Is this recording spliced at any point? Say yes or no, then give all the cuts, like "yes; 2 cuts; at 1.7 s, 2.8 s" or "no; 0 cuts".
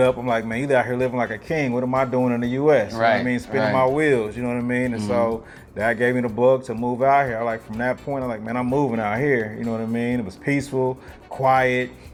no; 0 cuts